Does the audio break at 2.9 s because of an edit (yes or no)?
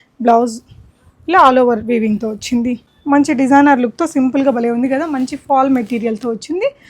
yes